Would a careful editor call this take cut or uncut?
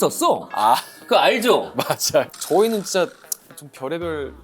cut